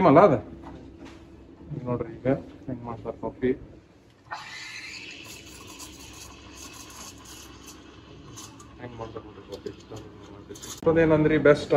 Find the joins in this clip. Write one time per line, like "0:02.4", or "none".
0:10.8